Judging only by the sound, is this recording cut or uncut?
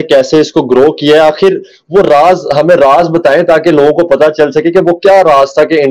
uncut